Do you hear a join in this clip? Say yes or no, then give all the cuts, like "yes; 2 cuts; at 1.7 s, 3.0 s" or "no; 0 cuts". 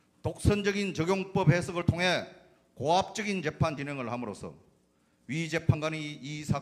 yes; 1 cut; at 3.7 s